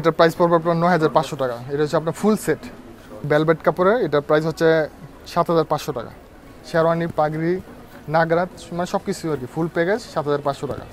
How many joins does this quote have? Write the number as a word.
two